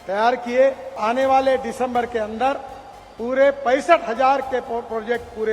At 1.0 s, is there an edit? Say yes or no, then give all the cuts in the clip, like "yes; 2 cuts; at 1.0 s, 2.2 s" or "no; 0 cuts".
yes; 1 cut; at 1.0 s